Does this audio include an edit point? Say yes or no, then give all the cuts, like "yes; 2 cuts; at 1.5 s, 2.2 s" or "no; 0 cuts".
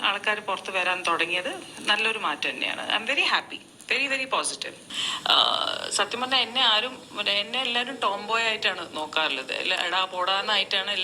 yes; 1 cut; at 4.8 s